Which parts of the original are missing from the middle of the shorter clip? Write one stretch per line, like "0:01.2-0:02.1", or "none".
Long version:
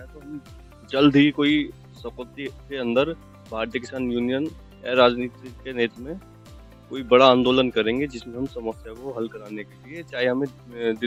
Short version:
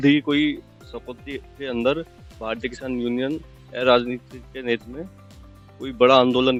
none